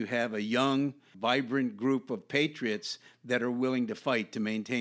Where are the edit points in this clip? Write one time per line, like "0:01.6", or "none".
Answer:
0:01.1